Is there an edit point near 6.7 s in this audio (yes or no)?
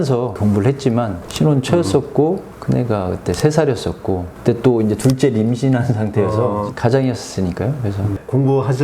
yes